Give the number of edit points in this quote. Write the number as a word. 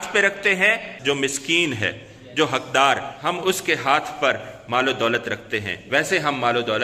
two